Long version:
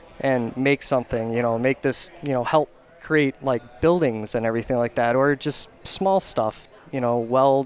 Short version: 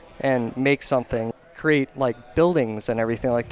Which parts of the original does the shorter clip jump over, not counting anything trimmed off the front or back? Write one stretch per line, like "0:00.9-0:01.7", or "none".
0:01.3-0:02.7